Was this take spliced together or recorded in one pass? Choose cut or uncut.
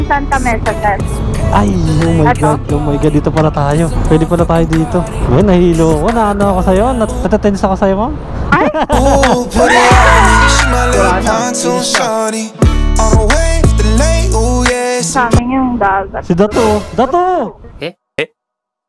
cut